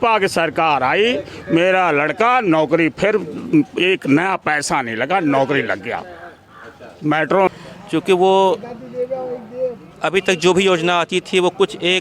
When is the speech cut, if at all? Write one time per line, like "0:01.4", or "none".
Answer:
0:07.5